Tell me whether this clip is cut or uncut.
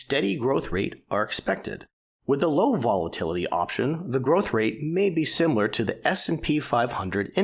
uncut